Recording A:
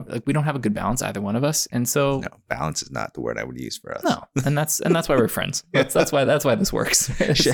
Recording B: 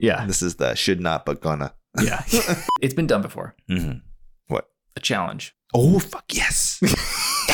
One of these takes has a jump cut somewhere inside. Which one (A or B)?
B